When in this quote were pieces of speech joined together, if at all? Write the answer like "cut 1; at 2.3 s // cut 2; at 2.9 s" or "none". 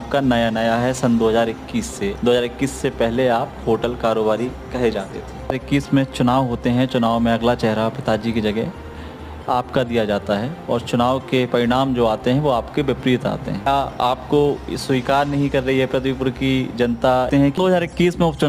cut 1; at 2.2 s // cut 2; at 5.5 s // cut 3; at 13.7 s // cut 4; at 17.3 s